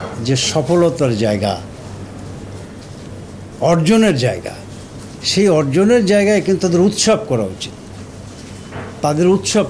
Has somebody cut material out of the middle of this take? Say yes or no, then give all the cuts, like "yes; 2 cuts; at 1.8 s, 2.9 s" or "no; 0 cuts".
no; 0 cuts